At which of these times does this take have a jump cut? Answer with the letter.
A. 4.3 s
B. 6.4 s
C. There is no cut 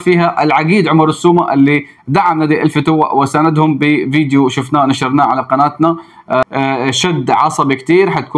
B